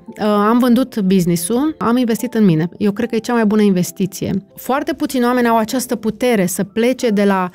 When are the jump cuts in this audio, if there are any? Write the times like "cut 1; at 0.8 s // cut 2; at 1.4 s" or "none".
cut 1; at 1.8 s // cut 2; at 4.5 s